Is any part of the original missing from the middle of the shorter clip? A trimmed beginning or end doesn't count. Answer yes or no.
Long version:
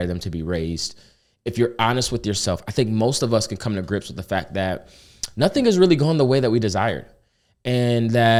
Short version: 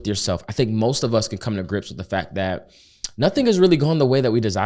no